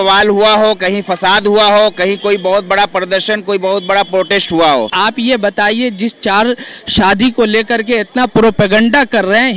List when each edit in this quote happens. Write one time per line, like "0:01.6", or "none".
0:04.9